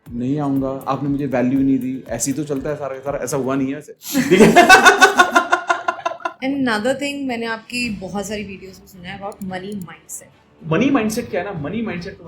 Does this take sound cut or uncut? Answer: cut